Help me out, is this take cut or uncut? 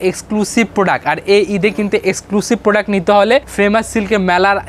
cut